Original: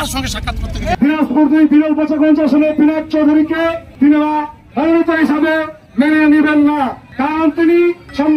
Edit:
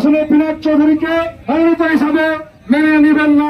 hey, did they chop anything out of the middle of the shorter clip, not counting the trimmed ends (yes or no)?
yes